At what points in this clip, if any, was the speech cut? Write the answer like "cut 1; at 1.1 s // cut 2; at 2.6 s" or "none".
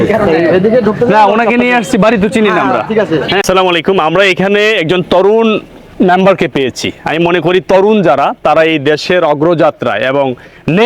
cut 1; at 3.4 s